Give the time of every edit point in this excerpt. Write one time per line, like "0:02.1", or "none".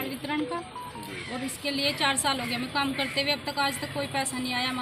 none